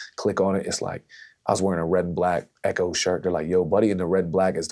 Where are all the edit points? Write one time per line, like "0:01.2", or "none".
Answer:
none